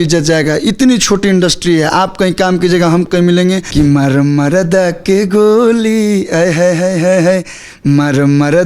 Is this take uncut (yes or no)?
no